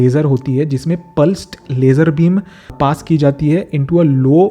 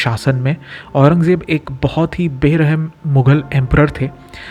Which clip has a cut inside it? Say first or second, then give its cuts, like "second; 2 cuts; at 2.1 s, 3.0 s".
first; 1 cut; at 2.6 s